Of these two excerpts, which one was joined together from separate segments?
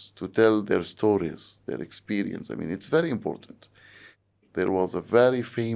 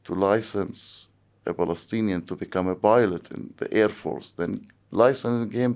first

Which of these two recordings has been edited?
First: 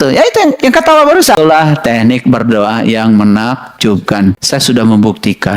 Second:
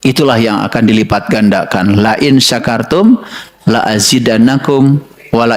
first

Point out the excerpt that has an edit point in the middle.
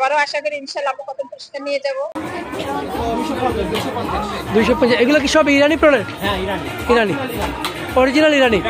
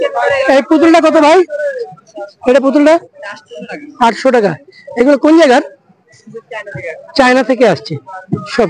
first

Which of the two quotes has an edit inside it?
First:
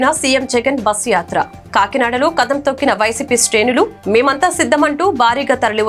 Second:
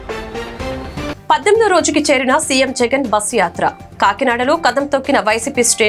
second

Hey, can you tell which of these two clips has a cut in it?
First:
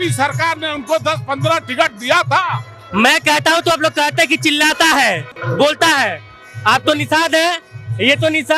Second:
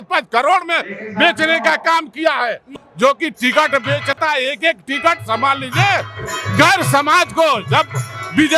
second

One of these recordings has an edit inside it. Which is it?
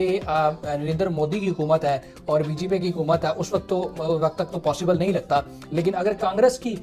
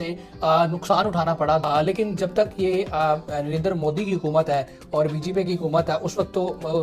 second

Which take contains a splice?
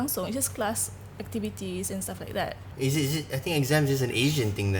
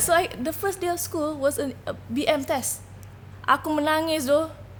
first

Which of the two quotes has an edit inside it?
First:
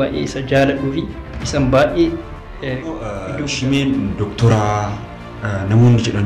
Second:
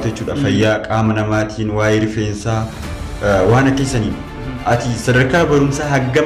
first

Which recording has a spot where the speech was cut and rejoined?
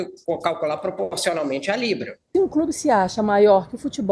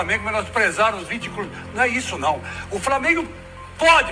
first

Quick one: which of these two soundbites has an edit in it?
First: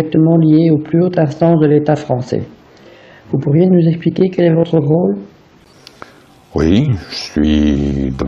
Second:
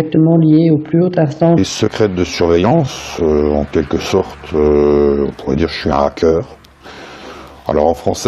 first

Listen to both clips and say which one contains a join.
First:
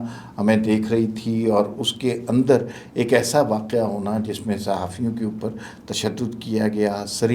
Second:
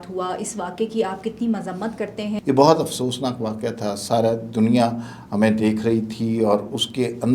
second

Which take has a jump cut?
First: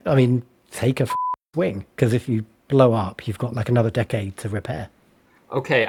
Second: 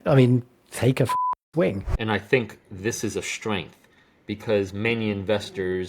second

